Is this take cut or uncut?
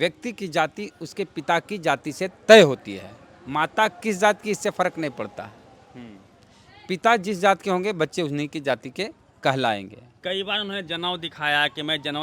cut